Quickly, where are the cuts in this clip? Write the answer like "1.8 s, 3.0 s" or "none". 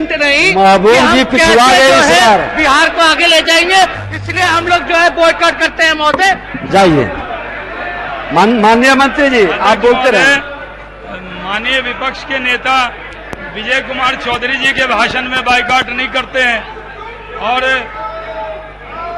none